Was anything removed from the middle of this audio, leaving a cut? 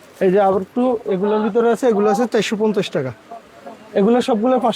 no; 0 cuts

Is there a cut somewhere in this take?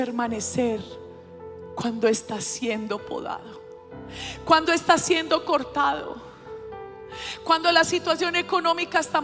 no; 0 cuts

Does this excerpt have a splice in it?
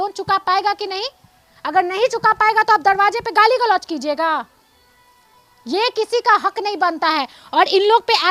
no; 0 cuts

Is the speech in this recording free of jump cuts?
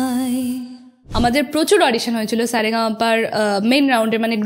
no; 1 cut; at 1.0 s

